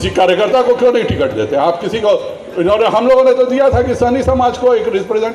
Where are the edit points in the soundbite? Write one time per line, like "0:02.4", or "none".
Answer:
none